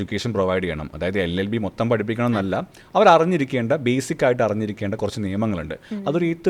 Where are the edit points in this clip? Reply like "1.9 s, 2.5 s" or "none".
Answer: none